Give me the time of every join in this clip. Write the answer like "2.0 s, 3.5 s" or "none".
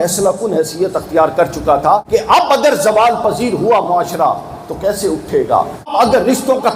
2.0 s, 5.9 s